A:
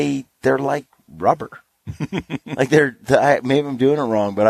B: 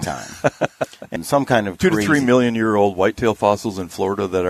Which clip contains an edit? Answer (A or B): B